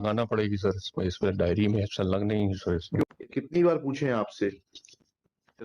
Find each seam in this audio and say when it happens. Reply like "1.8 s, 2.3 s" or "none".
3.0 s